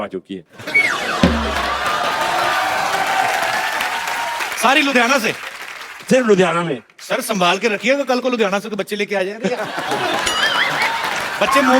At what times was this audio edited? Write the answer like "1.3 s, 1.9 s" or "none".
none